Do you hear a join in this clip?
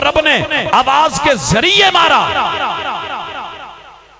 no; 0 cuts

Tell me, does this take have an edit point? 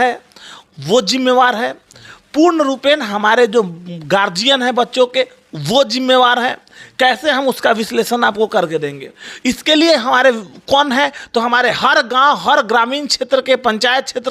no; 0 cuts

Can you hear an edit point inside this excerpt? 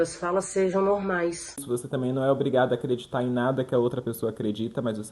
yes; 1 cut; at 1.6 s

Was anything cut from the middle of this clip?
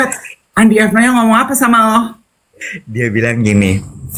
no; 0 cuts

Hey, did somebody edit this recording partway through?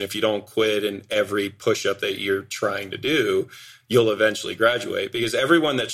no; 0 cuts

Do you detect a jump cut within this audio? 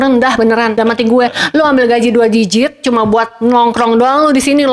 no; 0 cuts

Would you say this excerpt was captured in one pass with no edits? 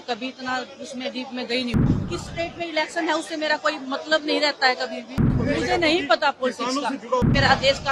no; 3 cuts; at 1.8 s, 5.3 s, 7.2 s

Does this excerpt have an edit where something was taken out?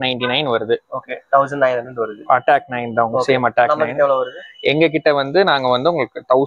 no; 0 cuts

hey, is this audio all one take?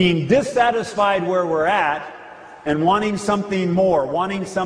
yes; 0 cuts

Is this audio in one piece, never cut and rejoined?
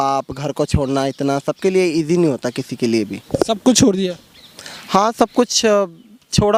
yes; 0 cuts

